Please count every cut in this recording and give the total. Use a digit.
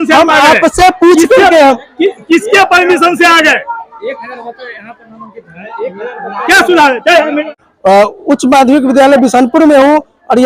1